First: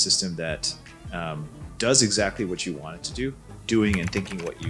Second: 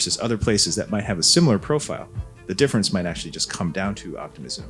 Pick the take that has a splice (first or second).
first